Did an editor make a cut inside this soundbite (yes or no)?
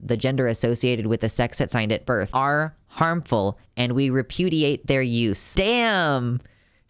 yes